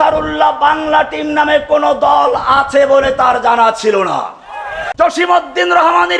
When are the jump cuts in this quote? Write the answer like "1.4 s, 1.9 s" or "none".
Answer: 4.8 s